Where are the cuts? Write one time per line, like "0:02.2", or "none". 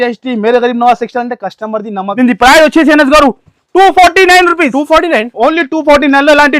0:02.1